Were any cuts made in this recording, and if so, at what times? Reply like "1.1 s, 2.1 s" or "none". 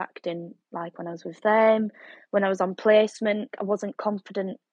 3.5 s